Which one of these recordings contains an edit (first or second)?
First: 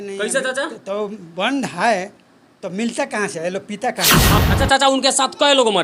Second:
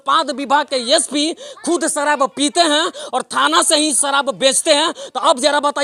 first